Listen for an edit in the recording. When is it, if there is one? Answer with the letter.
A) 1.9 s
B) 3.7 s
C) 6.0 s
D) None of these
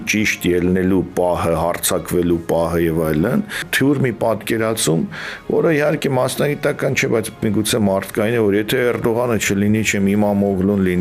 B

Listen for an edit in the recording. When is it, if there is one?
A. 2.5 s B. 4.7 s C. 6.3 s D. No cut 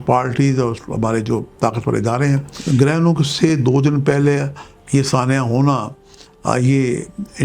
A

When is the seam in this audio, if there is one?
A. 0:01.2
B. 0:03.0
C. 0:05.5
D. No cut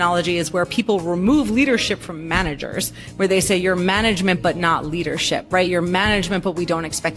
D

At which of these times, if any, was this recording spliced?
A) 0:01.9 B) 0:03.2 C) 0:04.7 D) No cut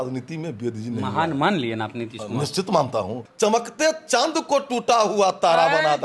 B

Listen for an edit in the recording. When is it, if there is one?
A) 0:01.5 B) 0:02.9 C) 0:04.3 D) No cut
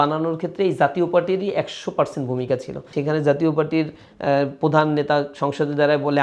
B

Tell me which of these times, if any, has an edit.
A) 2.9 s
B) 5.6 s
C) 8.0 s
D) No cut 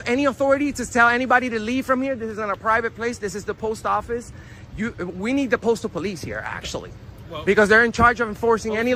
D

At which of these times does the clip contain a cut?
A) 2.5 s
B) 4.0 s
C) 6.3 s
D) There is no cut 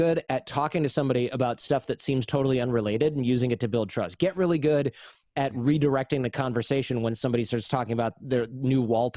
D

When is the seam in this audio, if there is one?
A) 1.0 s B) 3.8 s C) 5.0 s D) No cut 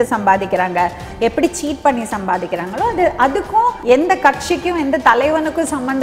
B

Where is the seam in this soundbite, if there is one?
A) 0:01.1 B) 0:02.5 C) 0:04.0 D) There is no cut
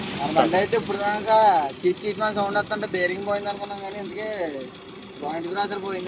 D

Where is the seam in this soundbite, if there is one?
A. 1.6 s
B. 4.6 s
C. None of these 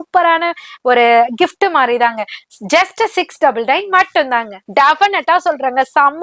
B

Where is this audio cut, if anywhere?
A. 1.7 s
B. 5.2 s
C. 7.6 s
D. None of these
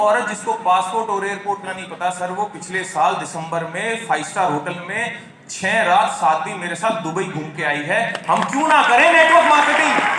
D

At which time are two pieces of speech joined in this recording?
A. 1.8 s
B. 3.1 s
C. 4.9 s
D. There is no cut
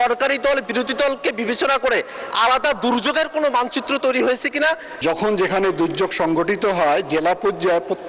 C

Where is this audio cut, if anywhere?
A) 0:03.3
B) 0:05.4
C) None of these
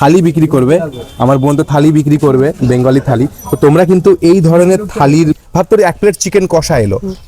B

